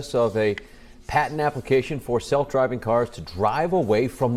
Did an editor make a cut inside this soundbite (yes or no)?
no